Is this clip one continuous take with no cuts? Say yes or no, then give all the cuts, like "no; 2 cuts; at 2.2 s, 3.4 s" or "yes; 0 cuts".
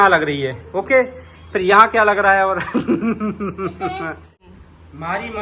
no; 1 cut; at 4.4 s